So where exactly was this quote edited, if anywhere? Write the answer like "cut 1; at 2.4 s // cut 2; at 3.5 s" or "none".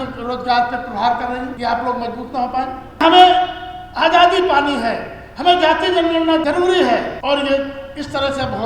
cut 1; at 1.5 s // cut 2; at 3.0 s // cut 3; at 6.4 s // cut 4; at 7.1 s